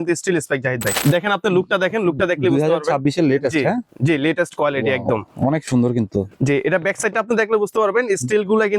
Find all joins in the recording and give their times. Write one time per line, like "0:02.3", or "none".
0:00.9